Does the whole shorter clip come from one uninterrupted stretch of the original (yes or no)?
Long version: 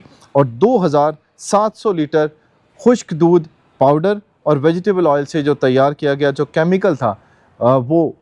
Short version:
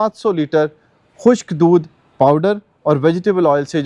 yes